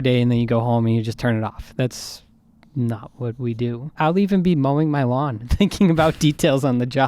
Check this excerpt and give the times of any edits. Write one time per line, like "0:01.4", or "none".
0:03.9